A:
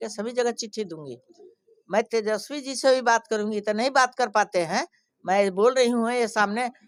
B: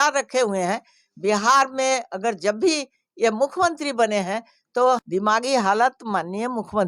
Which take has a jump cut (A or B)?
B